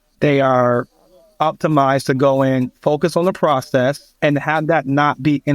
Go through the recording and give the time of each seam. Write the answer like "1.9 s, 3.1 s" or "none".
4.1 s